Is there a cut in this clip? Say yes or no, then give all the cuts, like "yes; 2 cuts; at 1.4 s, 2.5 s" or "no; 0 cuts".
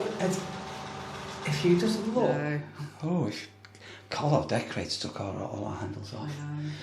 yes; 1 cut; at 2.4 s